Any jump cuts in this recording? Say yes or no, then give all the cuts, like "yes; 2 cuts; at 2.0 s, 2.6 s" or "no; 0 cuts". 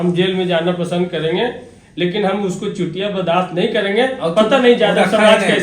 no; 0 cuts